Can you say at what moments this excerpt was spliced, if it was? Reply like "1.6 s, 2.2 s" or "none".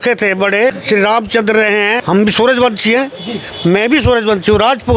0.8 s, 2.0 s